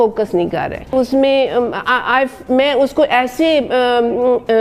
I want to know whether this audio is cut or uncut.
cut